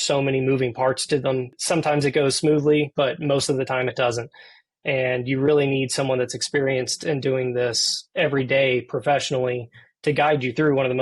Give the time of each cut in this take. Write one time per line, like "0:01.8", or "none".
0:01.5

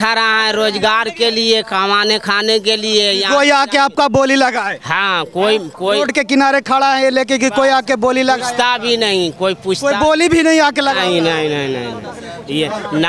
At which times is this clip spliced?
none

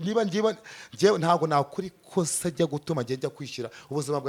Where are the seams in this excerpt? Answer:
none

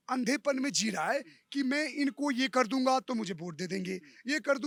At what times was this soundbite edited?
none

